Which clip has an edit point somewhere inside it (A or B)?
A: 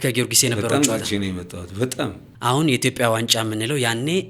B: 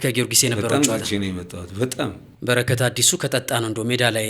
B